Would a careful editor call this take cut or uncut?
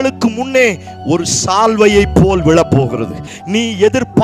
cut